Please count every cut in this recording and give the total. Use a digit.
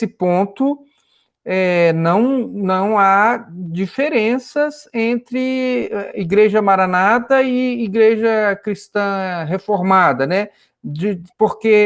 0